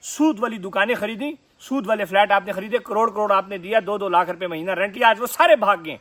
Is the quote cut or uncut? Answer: uncut